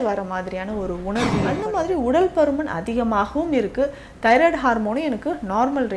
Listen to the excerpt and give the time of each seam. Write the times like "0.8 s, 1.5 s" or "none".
1.6 s